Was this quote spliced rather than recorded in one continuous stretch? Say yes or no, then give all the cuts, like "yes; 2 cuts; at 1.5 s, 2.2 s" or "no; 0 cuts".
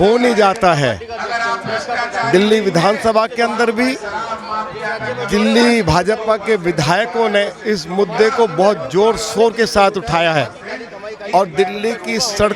no; 0 cuts